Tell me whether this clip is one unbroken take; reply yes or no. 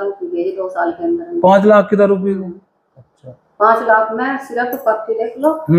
yes